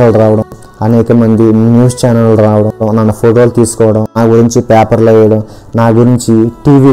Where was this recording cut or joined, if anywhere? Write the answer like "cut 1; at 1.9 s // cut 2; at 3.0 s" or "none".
cut 1; at 2.8 s // cut 2; at 4.2 s

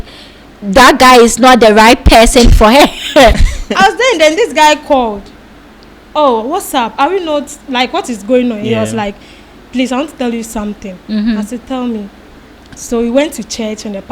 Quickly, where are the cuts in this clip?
cut 1; at 3.5 s

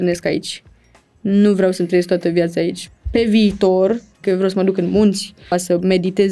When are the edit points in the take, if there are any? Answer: cut 1; at 2.8 s // cut 2; at 4.2 s // cut 3; at 5.5 s

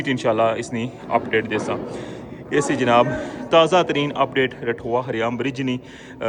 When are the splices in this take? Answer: none

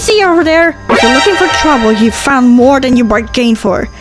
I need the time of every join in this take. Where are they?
none

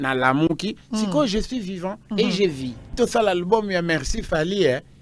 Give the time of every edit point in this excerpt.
cut 1; at 2.9 s

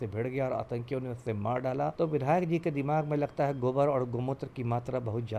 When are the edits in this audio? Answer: cut 1; at 1.9 s

